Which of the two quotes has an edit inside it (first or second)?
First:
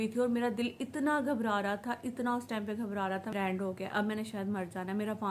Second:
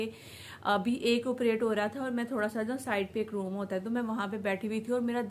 first